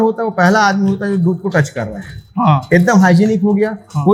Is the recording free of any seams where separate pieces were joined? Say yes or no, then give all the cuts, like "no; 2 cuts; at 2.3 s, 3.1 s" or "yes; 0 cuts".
yes; 0 cuts